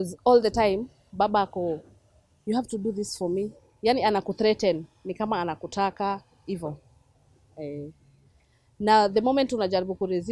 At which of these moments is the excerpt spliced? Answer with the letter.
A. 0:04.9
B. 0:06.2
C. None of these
C